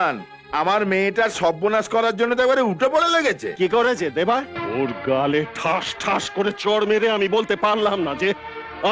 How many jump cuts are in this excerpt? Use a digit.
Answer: 1